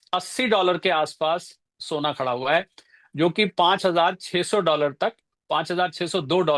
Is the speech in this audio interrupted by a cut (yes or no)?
no